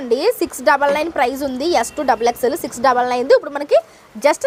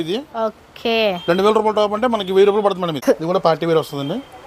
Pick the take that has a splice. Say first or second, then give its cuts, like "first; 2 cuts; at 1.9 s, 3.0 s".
second; 1 cut; at 3.1 s